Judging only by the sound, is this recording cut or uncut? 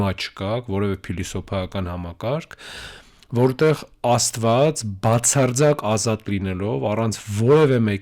uncut